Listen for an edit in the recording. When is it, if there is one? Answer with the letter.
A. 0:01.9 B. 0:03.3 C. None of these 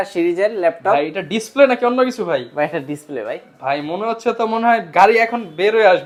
C